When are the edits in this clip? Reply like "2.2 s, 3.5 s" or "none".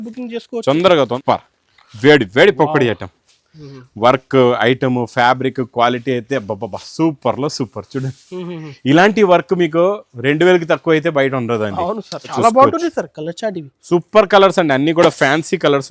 1.1 s, 12.3 s